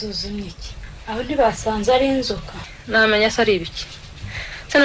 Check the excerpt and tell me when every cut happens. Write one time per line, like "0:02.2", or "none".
0:02.7